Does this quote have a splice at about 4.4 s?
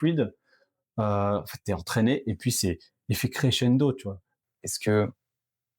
yes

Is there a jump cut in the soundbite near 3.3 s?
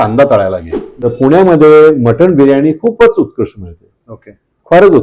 no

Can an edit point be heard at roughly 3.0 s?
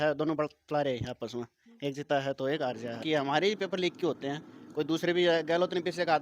yes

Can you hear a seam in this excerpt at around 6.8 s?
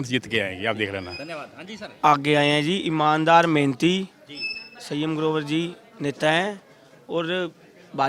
no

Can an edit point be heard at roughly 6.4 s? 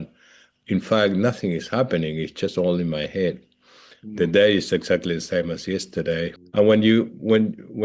yes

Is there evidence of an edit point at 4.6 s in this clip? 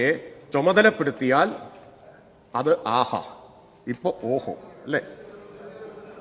no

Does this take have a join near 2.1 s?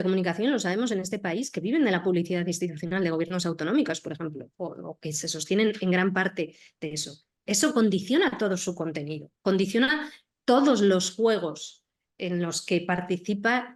no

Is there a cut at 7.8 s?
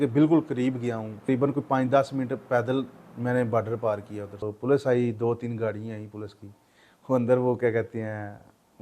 no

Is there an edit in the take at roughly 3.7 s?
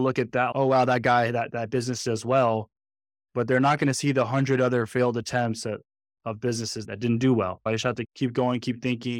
no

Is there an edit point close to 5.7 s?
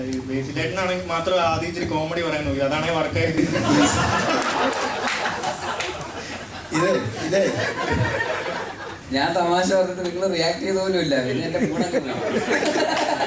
no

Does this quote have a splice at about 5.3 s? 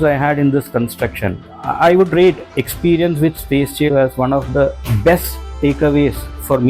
no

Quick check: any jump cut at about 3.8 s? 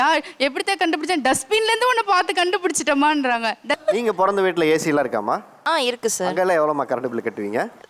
yes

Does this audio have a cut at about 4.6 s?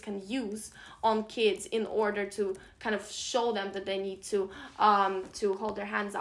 no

